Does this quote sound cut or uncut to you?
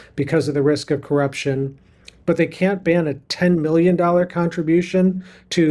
uncut